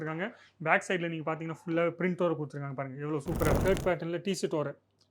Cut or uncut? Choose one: cut